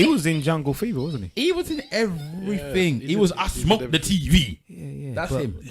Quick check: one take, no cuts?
no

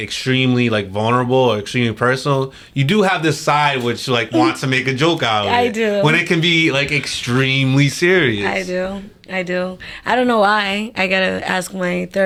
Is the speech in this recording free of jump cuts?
yes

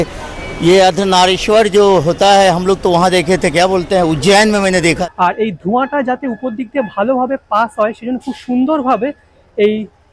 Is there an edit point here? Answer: yes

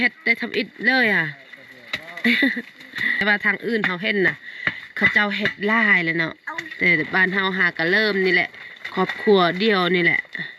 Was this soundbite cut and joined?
yes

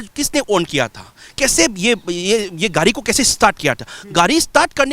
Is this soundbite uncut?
yes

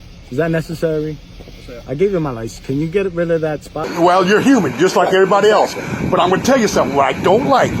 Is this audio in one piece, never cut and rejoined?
no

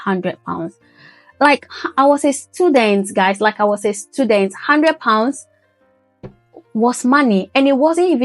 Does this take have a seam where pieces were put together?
no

